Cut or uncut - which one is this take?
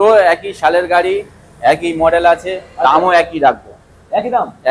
uncut